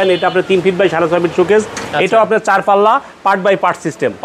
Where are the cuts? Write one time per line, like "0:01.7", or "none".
0:01.8